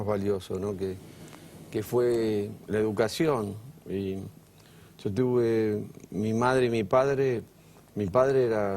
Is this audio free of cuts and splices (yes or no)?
no